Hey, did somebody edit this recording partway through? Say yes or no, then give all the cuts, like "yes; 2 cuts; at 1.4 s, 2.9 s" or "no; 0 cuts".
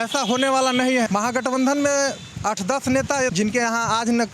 yes; 2 cuts; at 1.1 s, 3.3 s